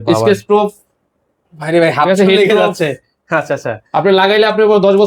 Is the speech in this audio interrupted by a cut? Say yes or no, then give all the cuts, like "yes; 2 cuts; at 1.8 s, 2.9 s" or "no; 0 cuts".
no; 0 cuts